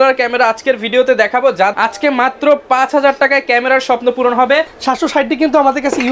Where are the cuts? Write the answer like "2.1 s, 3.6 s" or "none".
1.7 s, 4.7 s